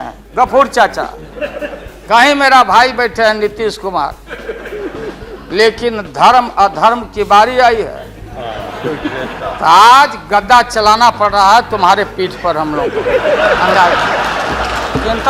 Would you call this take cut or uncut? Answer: uncut